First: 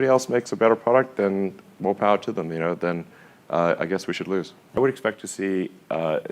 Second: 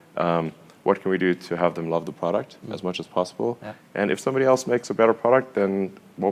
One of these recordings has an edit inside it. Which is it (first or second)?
first